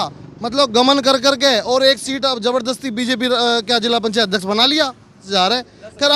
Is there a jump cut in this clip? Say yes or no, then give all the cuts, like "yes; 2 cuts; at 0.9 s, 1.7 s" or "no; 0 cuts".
yes; 1 cut; at 5.3 s